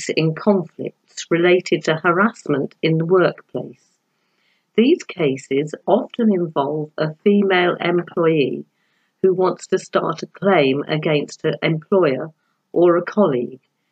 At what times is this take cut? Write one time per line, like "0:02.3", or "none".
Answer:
none